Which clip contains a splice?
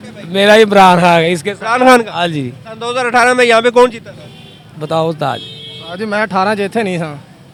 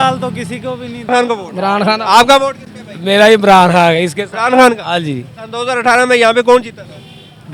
second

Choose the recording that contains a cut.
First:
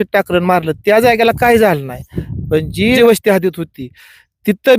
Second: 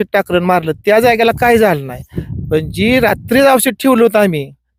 first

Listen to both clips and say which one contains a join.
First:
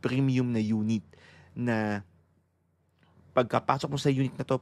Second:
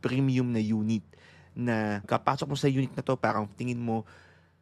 second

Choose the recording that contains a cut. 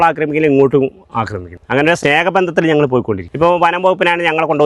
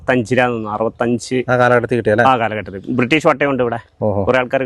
first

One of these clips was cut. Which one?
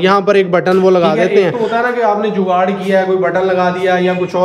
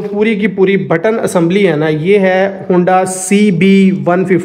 first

